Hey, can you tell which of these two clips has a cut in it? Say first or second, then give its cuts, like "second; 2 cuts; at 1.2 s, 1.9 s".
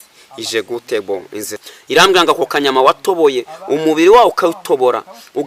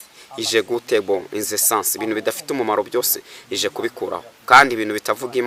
first; 1 cut; at 1.6 s